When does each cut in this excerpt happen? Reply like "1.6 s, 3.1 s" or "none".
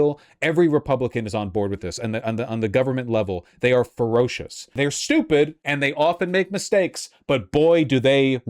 4.7 s, 5.6 s